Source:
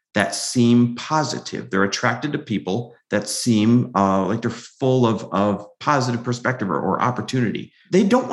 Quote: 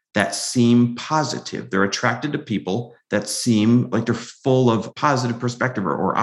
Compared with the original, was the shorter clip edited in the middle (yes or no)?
yes